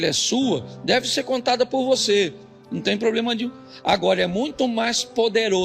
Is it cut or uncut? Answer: uncut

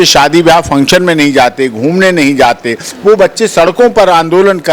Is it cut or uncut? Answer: uncut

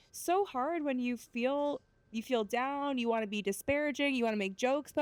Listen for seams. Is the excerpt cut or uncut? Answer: uncut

